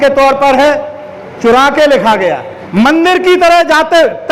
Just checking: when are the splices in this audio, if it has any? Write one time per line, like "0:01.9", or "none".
0:02.5